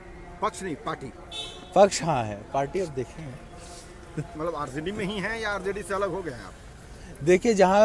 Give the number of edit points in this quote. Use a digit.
0